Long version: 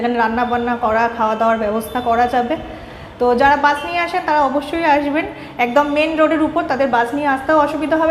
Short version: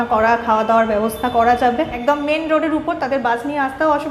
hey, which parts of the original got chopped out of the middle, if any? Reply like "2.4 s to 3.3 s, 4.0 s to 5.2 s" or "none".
2.7 s to 5.6 s